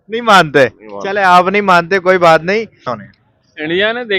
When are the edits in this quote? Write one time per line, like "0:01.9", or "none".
0:02.9